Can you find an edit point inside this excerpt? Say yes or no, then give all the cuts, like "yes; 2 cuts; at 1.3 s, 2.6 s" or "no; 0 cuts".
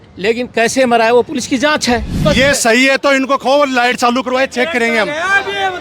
yes; 1 cut; at 2.2 s